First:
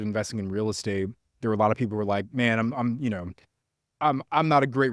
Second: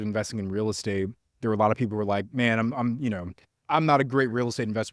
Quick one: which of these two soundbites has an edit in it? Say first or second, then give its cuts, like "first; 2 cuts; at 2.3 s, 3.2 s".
second; 1 cut; at 3.6 s